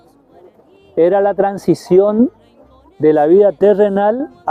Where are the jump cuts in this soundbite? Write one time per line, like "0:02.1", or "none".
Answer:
none